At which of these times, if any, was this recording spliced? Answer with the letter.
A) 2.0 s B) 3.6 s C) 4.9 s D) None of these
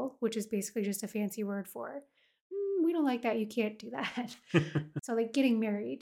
C